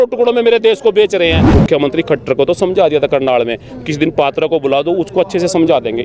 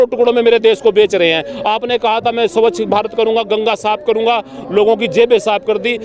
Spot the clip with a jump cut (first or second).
first